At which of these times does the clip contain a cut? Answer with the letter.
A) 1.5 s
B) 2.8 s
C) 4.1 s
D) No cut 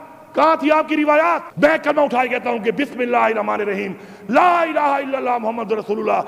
A